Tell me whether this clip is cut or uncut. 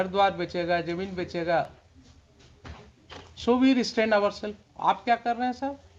uncut